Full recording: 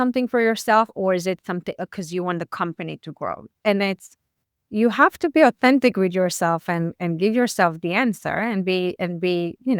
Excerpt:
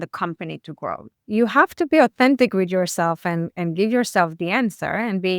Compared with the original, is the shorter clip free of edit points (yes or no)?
no